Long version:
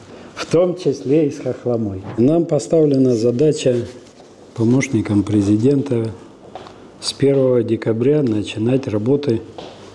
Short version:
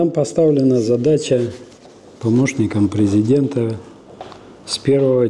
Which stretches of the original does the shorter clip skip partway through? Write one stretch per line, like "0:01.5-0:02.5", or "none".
none